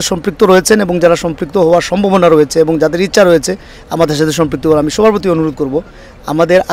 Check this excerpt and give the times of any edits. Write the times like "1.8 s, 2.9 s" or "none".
none

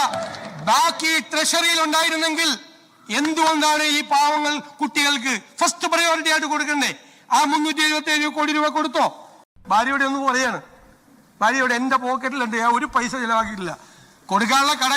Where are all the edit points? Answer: 9.5 s

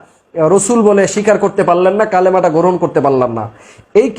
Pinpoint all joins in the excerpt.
none

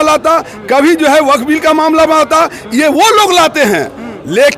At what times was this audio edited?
none

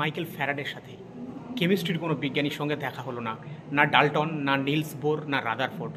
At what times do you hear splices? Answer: 1.3 s

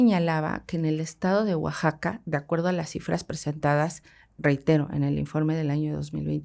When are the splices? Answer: none

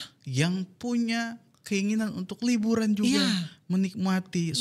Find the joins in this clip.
none

